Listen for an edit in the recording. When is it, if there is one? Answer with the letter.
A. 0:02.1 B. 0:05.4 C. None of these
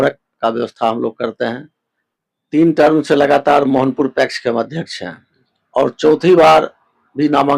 A